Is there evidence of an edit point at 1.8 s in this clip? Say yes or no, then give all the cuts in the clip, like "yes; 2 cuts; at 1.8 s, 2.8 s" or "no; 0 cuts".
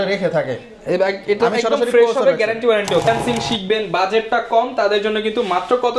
no; 1 cut; at 3.1 s